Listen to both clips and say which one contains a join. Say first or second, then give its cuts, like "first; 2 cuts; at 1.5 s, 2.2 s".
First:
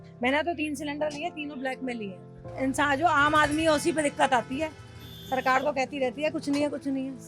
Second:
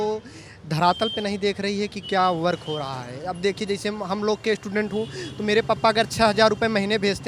first; 1 cut; at 2.4 s